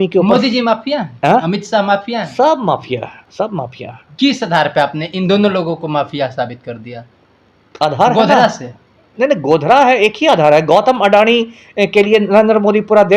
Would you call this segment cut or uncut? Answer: uncut